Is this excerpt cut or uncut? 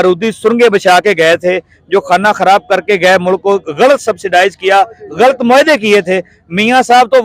uncut